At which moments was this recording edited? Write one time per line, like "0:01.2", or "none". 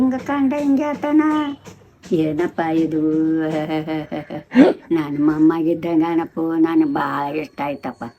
none